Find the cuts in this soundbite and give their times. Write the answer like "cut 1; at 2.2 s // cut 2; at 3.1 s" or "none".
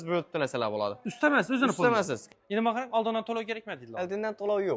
cut 1; at 2.2 s